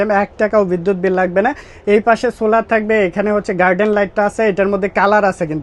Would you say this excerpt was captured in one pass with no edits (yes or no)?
yes